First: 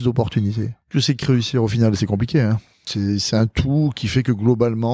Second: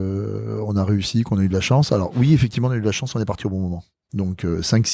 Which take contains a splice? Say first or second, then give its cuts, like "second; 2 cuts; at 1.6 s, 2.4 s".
first; 2 cuts; at 0.9 s, 2.9 s